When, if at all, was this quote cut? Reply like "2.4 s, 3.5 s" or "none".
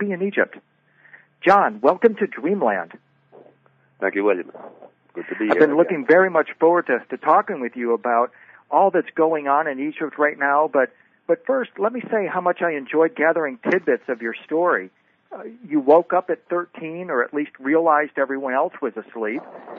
5.3 s